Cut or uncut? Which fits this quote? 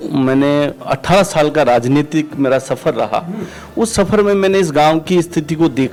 uncut